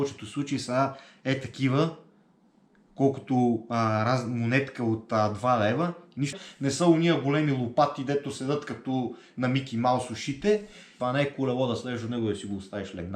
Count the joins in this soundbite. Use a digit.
2